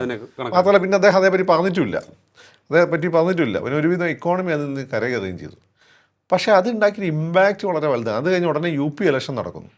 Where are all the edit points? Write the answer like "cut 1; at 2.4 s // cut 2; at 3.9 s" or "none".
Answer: none